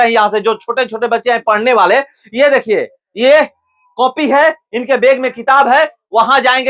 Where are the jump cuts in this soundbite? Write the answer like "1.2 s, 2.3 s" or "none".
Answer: none